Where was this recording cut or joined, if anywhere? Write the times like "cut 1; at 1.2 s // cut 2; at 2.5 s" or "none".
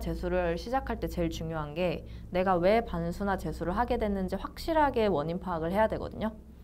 none